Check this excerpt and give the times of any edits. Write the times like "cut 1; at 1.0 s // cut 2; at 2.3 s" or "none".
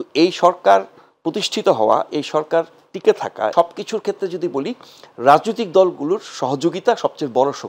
cut 1; at 3.5 s